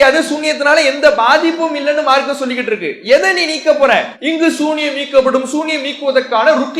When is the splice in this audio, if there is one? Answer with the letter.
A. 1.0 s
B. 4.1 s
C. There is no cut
B